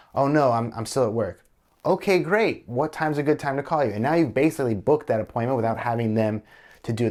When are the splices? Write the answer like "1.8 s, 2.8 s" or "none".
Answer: none